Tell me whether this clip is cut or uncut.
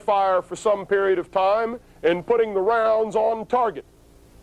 cut